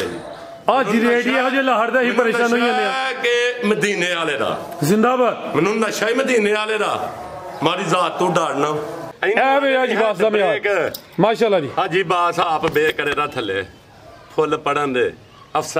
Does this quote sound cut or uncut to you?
cut